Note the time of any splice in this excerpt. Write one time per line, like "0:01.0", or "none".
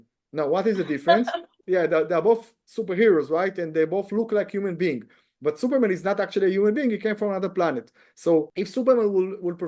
0:01.6
0:08.5